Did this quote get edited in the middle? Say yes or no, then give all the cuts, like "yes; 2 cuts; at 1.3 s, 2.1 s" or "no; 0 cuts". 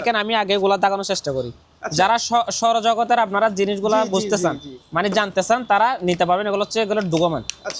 no; 0 cuts